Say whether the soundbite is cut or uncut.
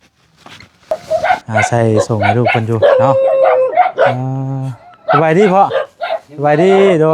cut